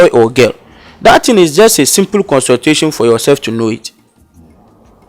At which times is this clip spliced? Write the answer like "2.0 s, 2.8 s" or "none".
none